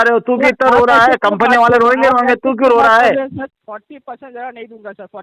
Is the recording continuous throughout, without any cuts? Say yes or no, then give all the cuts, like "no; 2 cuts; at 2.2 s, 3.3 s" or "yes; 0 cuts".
no; 1 cut; at 3.6 s